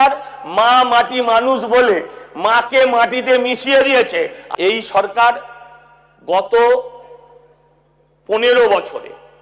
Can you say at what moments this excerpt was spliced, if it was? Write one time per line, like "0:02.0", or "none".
0:04.4